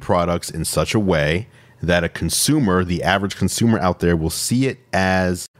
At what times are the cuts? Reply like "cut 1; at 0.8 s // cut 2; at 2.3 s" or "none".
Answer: none